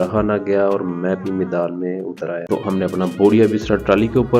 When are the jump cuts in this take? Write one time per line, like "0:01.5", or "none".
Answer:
0:02.4